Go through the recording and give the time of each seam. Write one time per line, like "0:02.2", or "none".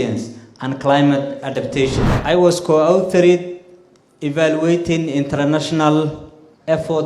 0:02.1